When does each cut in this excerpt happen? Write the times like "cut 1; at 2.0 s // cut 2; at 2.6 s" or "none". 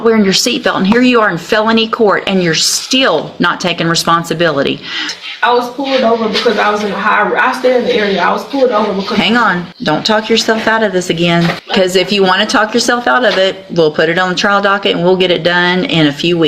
cut 1; at 5.1 s // cut 2; at 9.7 s // cut 3; at 11.6 s